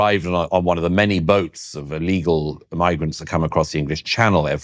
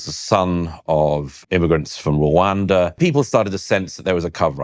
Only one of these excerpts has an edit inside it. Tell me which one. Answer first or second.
second